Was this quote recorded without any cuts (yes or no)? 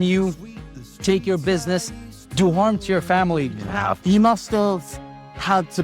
no